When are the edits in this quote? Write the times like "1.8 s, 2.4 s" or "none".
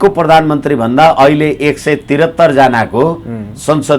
none